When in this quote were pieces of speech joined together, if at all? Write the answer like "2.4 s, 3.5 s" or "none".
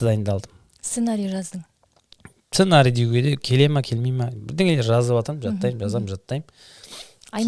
none